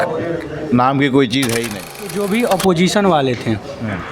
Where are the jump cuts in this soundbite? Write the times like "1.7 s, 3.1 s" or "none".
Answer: 2.3 s